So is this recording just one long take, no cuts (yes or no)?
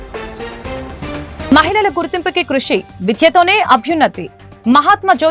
no